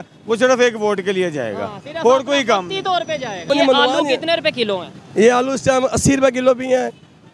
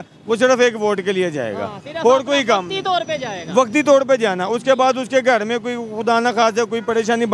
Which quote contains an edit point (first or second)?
first